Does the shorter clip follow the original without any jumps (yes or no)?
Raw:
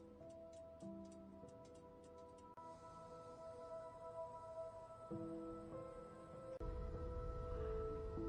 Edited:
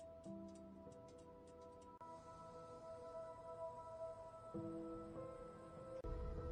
yes